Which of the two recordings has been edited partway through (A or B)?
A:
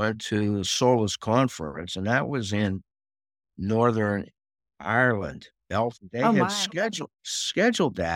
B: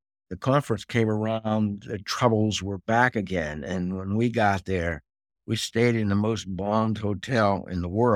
A